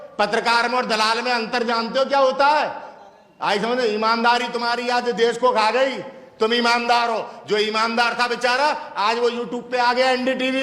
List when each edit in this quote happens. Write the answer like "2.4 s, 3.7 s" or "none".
none